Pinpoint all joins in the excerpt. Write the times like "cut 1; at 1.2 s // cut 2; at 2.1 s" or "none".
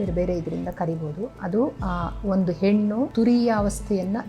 cut 1; at 1.8 s // cut 2; at 3.1 s